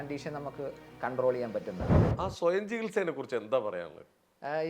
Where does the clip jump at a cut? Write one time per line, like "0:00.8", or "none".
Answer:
0:02.0

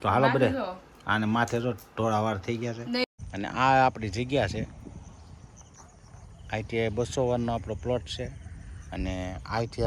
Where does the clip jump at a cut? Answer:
0:03.0

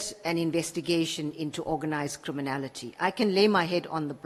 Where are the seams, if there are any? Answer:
none

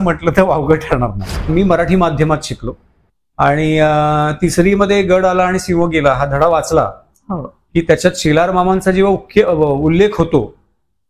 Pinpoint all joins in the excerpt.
0:01.5

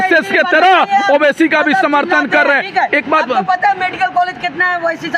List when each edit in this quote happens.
none

